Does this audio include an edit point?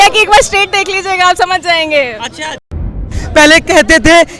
yes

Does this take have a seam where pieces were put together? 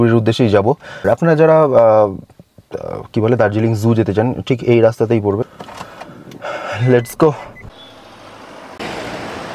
no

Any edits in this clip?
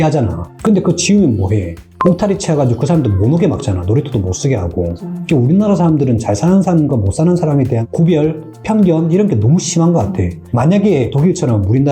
yes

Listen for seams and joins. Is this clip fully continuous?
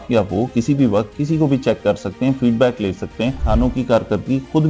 no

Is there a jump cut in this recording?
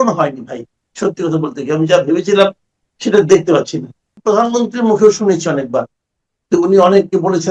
yes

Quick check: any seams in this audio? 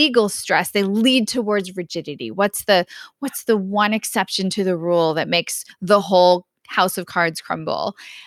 no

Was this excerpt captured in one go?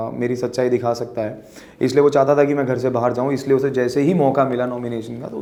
yes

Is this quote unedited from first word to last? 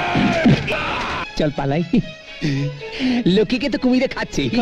no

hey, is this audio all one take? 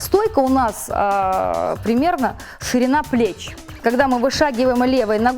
no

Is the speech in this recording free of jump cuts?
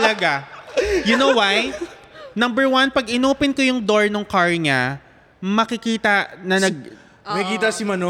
yes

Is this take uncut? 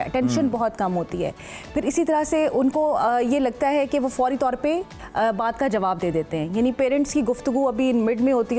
yes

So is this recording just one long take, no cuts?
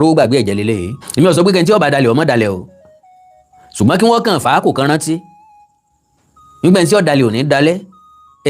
no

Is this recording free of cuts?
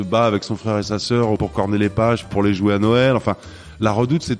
no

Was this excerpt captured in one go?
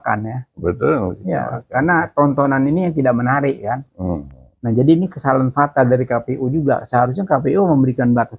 yes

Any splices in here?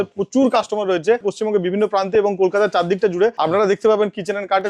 yes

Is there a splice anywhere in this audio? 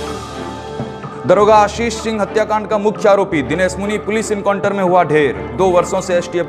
yes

